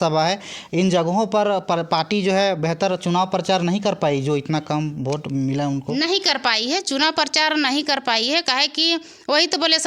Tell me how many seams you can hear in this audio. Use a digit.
0